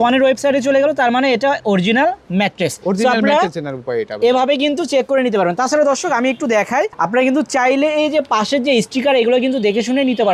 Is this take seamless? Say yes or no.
yes